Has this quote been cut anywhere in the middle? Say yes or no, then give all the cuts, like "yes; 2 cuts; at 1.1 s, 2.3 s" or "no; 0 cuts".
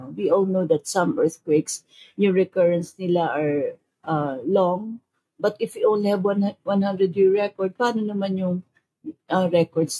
no; 0 cuts